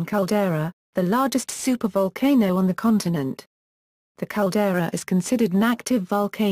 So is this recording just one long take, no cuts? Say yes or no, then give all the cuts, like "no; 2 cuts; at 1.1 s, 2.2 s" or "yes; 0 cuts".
no; 1 cut; at 5.0 s